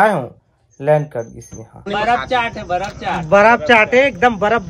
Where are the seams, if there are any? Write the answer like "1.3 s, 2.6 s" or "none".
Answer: 1.9 s